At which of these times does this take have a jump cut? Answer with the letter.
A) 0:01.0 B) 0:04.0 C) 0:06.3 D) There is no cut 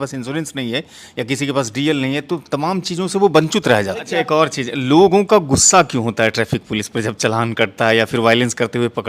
B